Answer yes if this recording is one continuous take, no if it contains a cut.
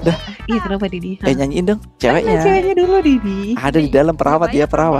no